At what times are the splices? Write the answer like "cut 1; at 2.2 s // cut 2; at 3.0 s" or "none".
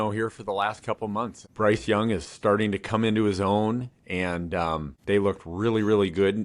cut 1; at 1.4 s // cut 2; at 4.9 s